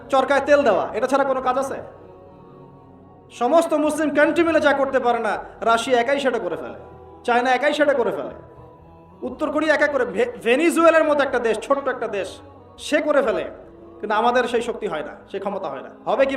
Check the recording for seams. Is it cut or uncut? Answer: cut